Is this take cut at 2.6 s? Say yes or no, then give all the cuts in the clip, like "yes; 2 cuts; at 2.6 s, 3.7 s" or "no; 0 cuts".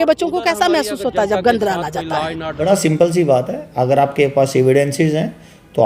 yes; 1 cut; at 2.6 s